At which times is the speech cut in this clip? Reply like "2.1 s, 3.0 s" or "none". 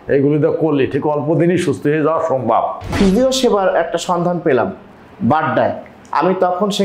2.9 s